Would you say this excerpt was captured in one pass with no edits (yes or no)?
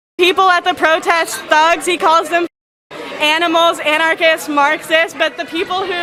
yes